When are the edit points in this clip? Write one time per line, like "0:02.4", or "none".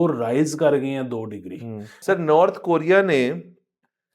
0:01.9